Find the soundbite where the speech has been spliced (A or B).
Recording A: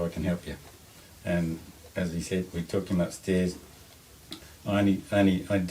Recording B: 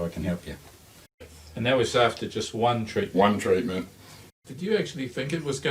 B